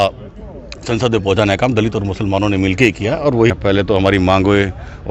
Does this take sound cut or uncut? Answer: cut